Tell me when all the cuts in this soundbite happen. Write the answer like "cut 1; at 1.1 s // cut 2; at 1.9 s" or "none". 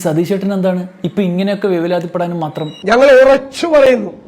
cut 1; at 2.7 s